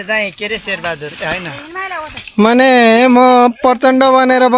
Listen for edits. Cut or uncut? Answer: uncut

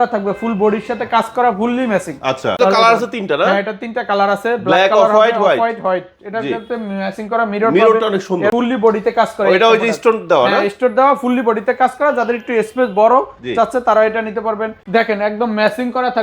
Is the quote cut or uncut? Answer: cut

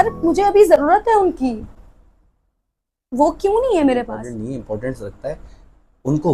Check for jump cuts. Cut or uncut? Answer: cut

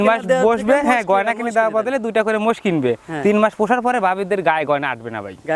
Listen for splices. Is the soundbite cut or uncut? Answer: uncut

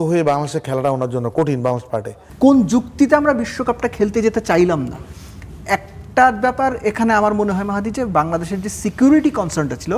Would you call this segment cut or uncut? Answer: cut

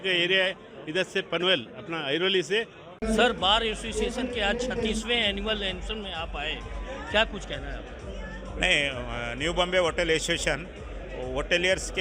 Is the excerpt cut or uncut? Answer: cut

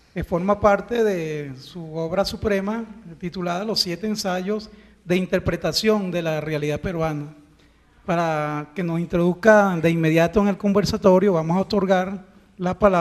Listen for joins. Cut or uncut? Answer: cut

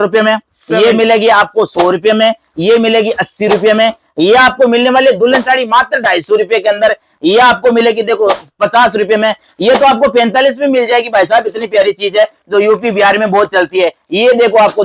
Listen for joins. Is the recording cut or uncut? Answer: uncut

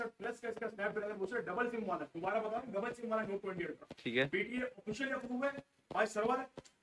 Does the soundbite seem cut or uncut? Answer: uncut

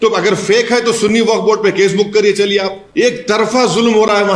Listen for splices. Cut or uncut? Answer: cut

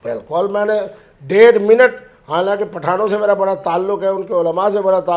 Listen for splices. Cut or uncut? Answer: uncut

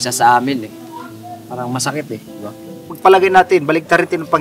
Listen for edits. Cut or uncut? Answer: cut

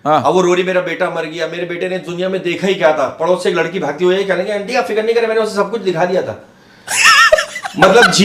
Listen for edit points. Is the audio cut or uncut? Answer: uncut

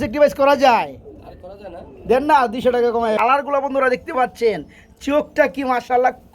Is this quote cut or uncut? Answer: cut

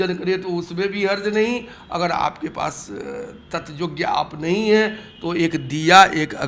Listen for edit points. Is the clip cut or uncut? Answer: uncut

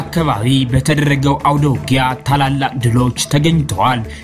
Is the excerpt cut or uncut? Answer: uncut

